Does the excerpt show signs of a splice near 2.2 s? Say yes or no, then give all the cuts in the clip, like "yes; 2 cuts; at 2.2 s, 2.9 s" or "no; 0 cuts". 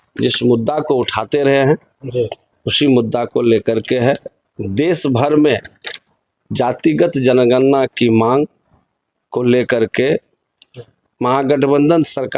no; 0 cuts